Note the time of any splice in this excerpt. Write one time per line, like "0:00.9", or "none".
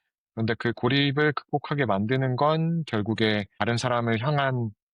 0:03.6

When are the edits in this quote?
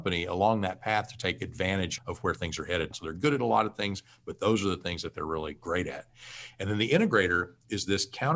0:01.9
0:02.9

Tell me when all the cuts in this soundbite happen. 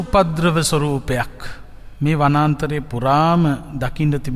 none

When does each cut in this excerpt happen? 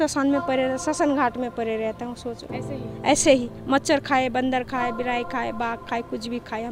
none

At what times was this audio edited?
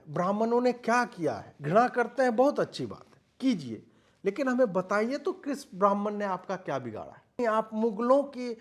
0:01.5
0:07.4

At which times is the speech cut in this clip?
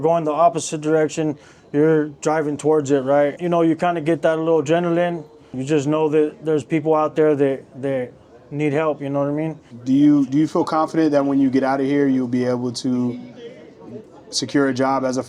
0:03.4
0:05.6
0:09.7

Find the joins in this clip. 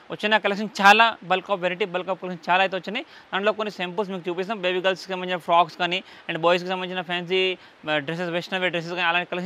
none

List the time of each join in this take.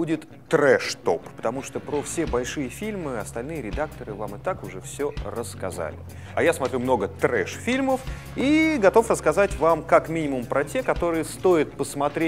0:05.4

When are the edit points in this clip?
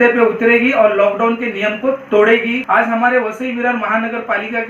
0:02.6

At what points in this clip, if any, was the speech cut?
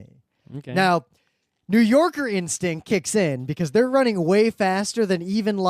none

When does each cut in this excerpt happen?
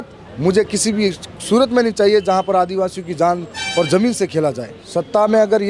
0:04.7

